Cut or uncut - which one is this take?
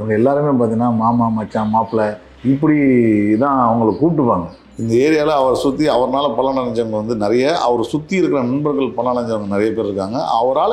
cut